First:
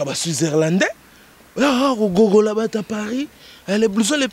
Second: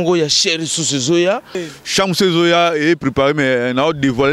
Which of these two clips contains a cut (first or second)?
second